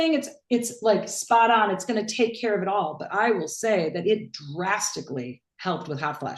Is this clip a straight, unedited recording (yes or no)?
yes